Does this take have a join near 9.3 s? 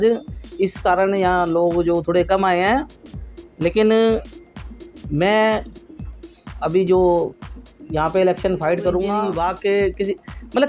yes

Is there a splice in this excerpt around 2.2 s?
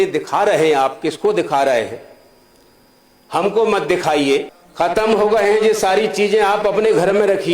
no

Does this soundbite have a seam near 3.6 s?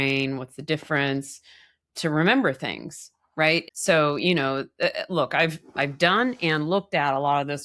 yes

